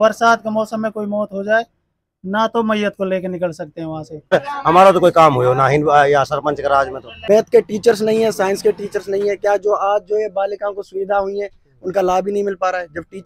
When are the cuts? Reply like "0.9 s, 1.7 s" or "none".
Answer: 4.3 s, 7.1 s